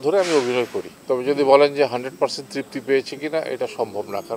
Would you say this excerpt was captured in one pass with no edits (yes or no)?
no